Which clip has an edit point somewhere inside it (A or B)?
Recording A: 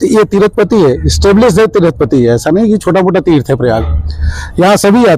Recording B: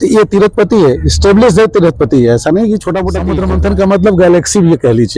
B